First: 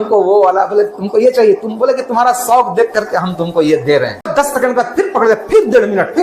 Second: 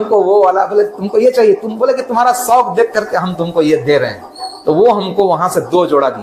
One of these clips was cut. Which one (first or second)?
first